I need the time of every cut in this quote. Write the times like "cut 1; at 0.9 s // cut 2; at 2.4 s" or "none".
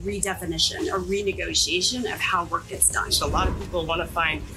cut 1; at 3.1 s